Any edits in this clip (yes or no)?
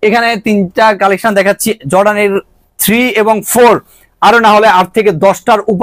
no